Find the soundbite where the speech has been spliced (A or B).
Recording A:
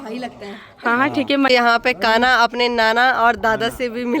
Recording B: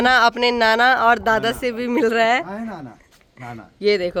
A